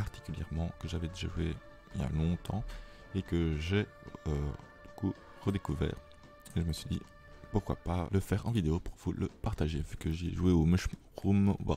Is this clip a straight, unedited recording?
no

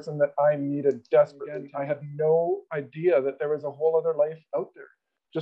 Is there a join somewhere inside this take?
yes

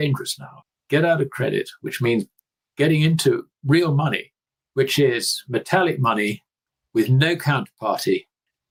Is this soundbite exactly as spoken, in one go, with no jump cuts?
yes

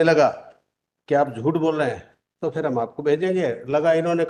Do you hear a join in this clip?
no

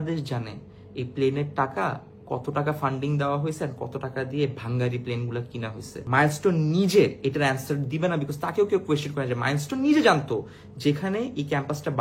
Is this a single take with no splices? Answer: no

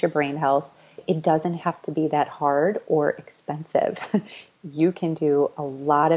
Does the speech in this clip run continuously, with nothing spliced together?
no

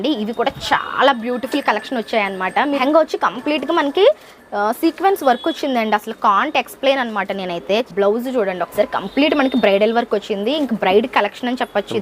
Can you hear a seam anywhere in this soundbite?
yes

